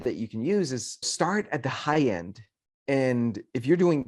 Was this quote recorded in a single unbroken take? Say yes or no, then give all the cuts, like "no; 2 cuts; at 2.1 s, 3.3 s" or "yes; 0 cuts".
no; 1 cut; at 1.0 s